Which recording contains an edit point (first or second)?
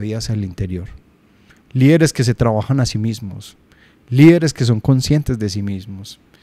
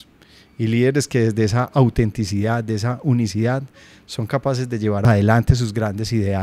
second